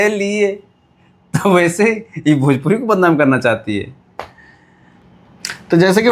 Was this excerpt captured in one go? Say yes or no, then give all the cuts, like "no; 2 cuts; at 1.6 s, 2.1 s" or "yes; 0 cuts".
yes; 0 cuts